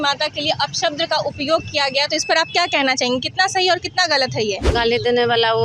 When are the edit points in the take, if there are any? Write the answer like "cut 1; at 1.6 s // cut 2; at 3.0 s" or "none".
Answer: cut 1; at 4.6 s

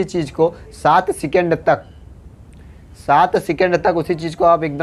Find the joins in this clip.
none

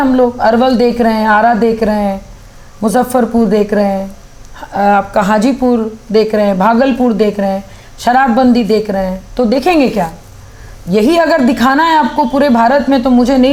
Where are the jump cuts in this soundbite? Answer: none

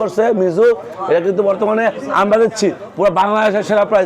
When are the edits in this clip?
none

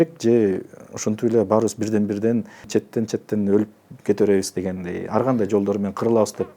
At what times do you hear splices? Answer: cut 1; at 2.7 s

